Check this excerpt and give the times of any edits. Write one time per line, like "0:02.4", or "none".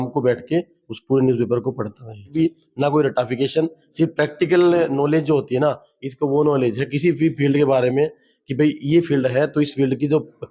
0:02.3